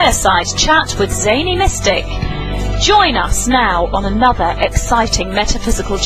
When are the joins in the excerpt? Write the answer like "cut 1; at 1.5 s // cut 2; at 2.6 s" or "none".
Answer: none